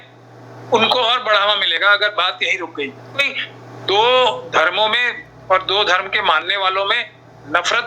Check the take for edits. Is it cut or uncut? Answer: cut